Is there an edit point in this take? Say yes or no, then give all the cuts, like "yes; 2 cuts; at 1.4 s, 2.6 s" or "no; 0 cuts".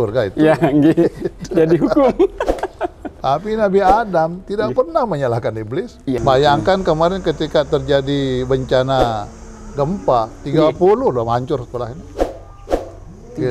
yes; 1 cut; at 6.2 s